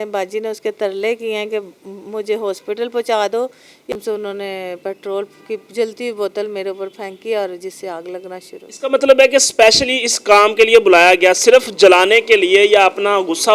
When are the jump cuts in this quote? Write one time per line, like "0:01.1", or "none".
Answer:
0:03.9